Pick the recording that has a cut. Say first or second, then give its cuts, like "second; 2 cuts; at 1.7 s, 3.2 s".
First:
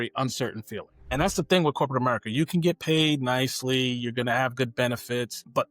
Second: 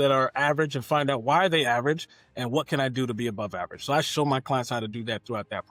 first; 1 cut; at 0.9 s